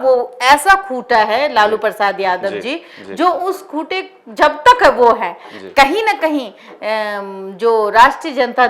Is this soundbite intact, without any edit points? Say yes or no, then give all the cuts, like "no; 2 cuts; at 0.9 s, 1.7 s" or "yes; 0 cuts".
yes; 0 cuts